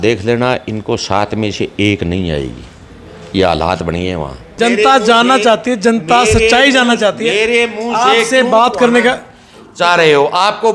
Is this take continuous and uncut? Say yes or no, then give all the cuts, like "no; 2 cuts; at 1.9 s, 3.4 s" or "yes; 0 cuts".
no; 1 cut; at 4.4 s